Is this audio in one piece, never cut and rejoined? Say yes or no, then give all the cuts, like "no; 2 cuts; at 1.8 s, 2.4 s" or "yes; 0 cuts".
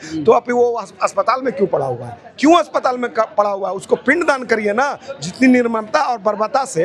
yes; 0 cuts